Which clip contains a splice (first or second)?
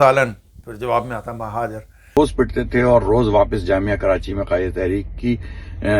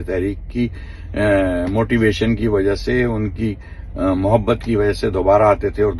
first